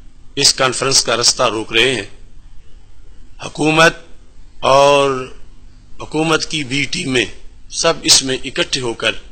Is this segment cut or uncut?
uncut